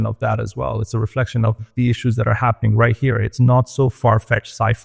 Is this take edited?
no; 0 cuts

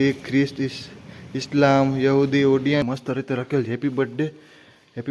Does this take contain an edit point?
yes; 1 cut; at 2.8 s

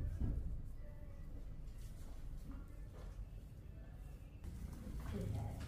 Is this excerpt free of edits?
no; 1 cut; at 4.4 s

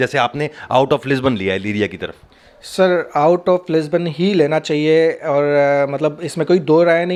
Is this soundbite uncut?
yes; 0 cuts

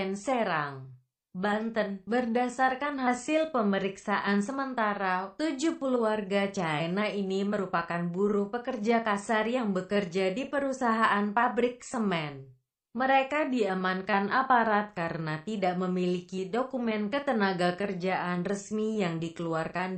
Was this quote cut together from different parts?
no; 0 cuts

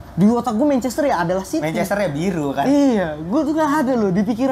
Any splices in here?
no; 0 cuts

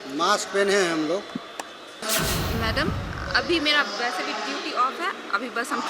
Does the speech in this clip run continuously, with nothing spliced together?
no; 1 cut; at 2.0 s

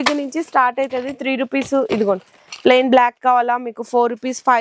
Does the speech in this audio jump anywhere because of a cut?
no; 0 cuts

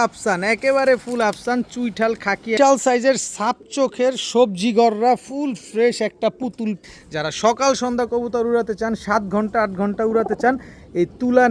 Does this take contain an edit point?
yes; 2 cuts; at 2.6 s, 6.8 s

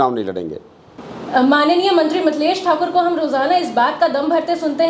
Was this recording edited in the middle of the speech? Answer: yes; 1 cut; at 1.1 s

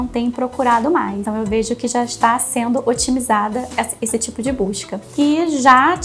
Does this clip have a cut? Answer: yes; 2 cuts; at 1.3 s, 5.1 s

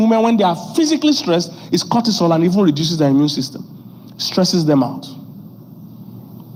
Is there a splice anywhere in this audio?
no; 0 cuts

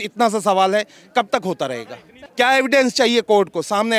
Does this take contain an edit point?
yes; 1 cut; at 2.2 s

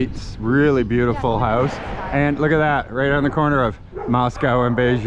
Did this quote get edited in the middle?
no; 0 cuts

